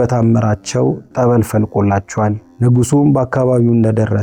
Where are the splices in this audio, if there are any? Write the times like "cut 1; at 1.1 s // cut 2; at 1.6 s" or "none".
cut 1; at 2.5 s